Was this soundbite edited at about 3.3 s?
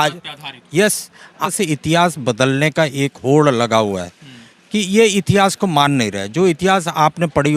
no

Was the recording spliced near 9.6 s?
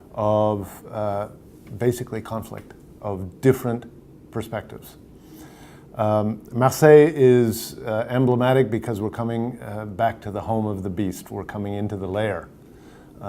yes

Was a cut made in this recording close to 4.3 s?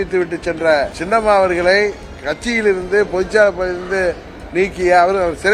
no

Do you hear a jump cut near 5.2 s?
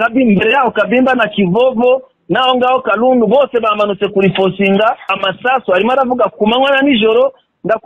yes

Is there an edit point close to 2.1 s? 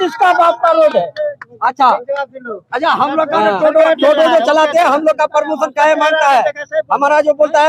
no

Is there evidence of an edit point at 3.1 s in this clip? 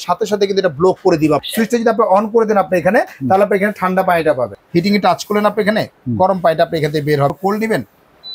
no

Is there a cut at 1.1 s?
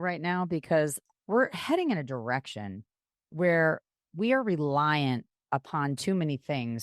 yes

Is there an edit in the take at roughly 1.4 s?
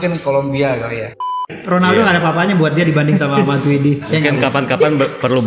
yes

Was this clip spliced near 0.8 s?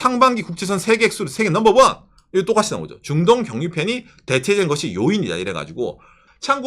no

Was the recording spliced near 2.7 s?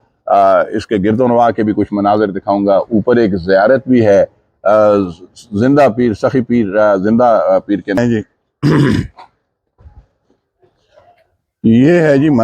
no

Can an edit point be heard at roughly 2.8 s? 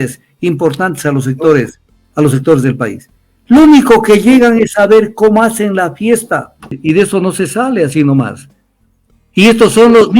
no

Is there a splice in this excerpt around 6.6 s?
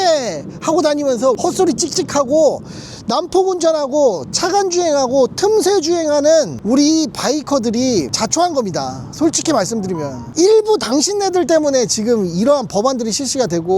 yes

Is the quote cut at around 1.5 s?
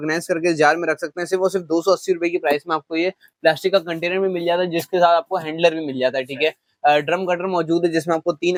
no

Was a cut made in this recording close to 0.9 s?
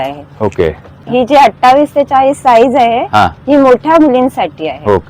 yes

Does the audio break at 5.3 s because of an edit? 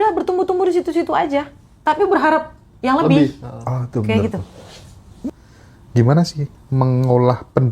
yes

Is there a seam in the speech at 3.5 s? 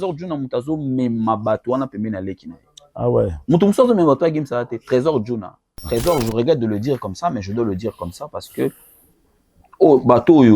no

